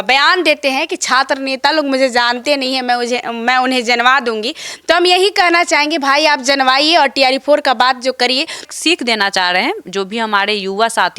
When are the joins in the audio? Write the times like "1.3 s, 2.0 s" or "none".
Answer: 8.7 s